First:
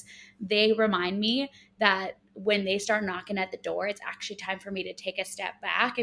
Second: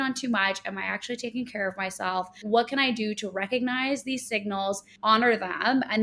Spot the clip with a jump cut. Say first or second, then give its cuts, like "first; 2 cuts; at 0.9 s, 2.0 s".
second; 2 cuts; at 2.4 s, 4.9 s